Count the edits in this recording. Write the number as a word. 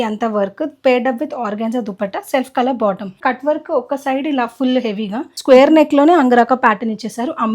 two